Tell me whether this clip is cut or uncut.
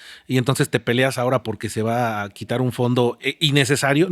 uncut